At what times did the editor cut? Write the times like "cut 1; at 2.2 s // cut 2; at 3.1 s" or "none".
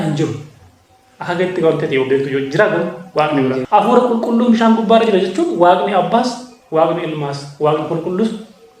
cut 1; at 3.6 s